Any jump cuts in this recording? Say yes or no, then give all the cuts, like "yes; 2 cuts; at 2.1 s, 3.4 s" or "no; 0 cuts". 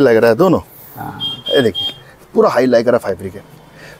no; 0 cuts